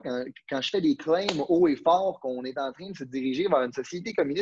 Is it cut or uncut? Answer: uncut